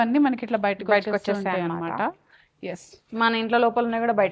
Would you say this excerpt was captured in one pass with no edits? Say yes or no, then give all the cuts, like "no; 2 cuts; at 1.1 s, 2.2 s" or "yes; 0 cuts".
yes; 0 cuts